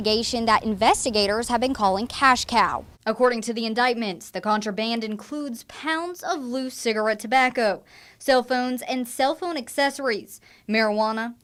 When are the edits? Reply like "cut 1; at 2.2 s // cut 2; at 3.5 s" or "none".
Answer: none

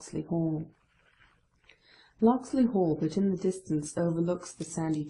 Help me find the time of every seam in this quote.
cut 1; at 3.8 s

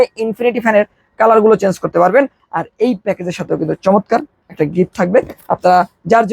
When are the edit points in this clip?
cut 1; at 2.4 s

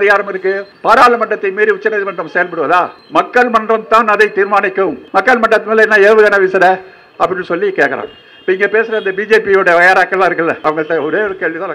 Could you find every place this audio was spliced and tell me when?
cut 1; at 5.0 s // cut 2; at 10.6 s

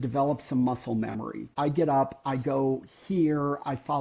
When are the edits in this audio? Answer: cut 1; at 1.5 s

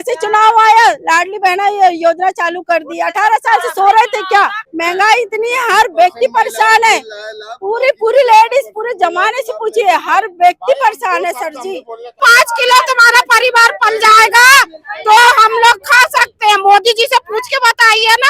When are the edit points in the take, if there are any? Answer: cut 1; at 4.7 s // cut 2; at 12.2 s

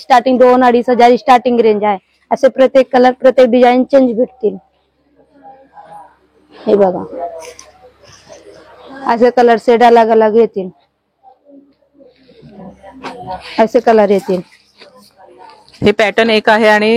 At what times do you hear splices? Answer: none

